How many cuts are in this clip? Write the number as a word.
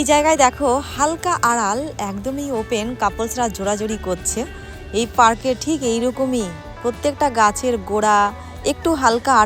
zero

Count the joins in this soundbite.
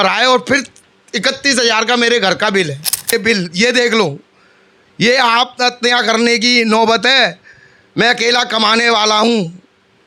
one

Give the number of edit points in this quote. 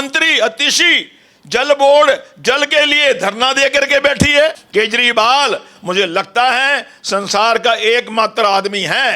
one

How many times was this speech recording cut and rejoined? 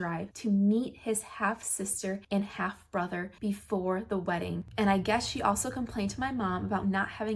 one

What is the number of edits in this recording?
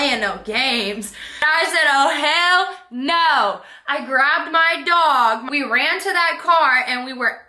two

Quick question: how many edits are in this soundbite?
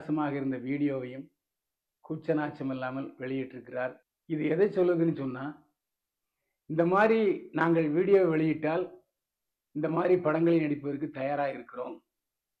one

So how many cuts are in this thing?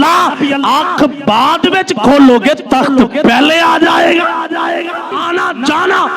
one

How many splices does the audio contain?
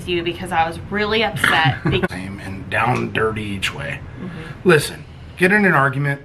one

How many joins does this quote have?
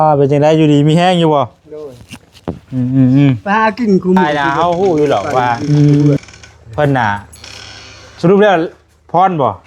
three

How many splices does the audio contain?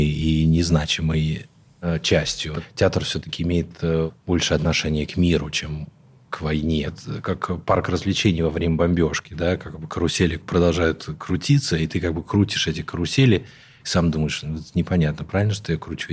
two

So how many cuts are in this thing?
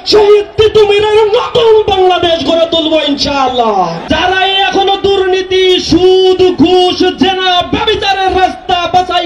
one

